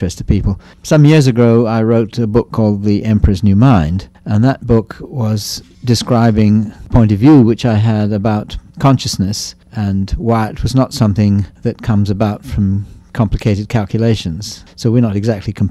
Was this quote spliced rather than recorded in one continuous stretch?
yes; 1 cut; at 5.0 s

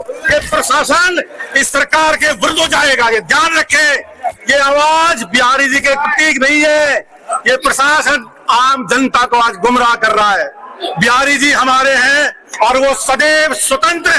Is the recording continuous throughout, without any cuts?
yes; 0 cuts

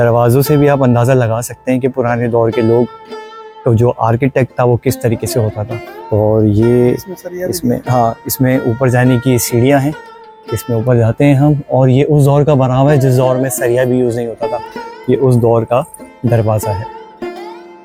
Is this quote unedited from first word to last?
yes; 0 cuts

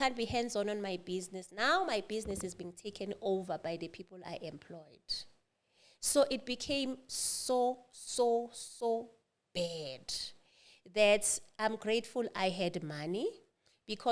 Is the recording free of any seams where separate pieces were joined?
yes; 0 cuts

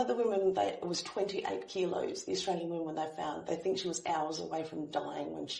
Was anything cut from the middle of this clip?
no; 0 cuts

